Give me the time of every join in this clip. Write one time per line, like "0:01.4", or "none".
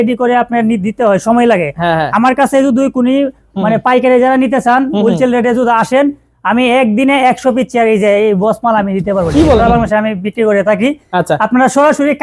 0:09.6